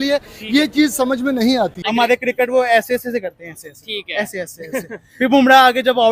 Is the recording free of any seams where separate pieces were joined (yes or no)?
no